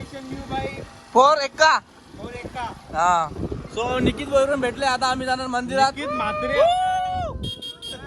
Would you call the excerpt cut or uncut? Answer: uncut